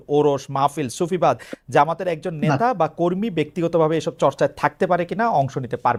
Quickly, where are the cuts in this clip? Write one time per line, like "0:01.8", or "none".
none

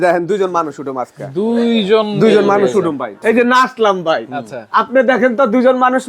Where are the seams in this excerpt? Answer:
0:03.1

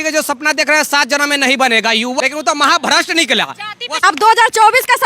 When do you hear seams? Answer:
0:02.2
0:04.0

